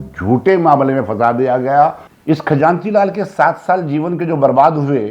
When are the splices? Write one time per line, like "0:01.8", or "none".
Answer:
0:02.1